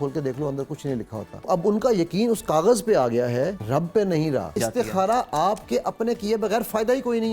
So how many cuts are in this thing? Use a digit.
3